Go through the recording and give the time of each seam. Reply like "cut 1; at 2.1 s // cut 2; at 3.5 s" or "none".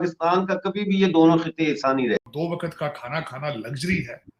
cut 1; at 2.3 s